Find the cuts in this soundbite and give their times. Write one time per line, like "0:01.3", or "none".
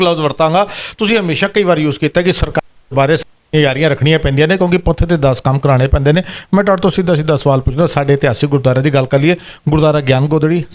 none